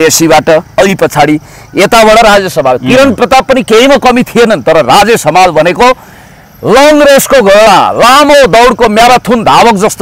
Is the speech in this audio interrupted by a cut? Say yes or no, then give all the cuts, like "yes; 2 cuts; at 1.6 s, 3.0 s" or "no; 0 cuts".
no; 0 cuts